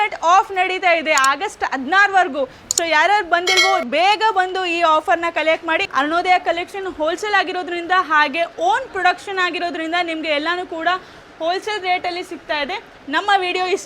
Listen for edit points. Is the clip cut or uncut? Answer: cut